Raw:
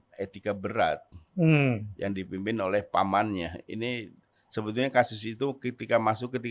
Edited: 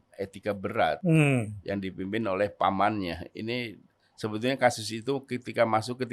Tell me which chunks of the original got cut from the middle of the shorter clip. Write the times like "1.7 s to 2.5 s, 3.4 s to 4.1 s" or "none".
1.0 s to 1.3 s